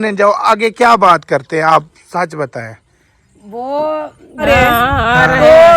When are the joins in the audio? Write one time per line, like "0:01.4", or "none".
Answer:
0:04.4